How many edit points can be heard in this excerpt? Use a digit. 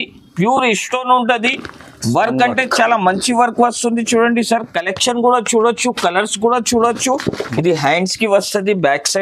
1